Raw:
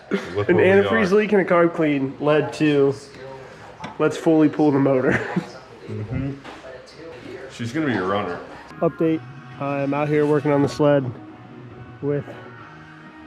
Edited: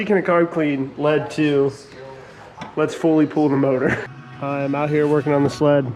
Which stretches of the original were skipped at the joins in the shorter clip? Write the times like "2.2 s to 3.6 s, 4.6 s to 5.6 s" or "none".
5.4 s to 9.4 s